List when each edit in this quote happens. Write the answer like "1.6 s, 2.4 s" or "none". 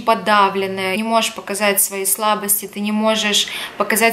0.9 s